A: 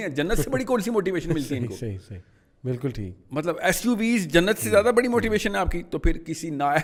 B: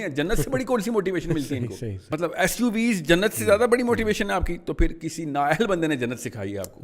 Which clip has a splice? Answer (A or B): B